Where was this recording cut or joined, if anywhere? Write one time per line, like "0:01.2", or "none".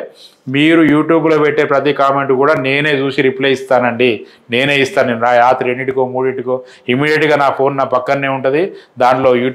none